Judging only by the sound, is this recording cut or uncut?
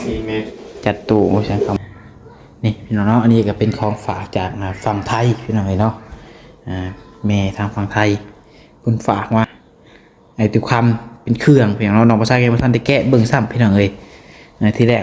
cut